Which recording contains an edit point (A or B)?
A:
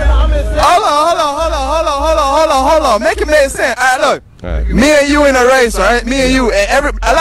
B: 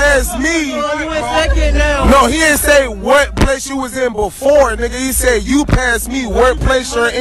B